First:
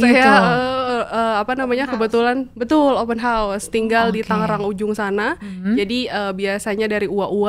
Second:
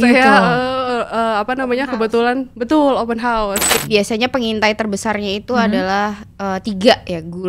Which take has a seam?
second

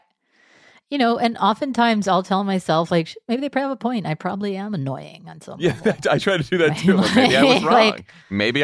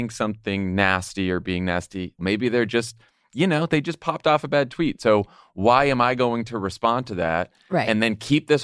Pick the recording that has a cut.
second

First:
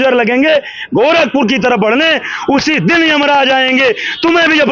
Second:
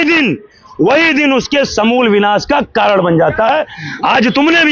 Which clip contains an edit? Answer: second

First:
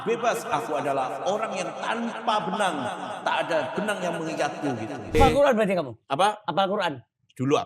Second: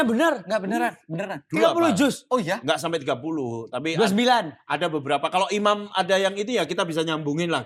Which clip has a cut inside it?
first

